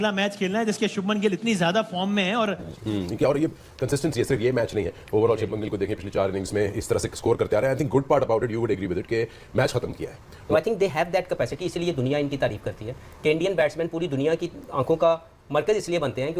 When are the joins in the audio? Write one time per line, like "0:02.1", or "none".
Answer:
0:02.7
0:10.4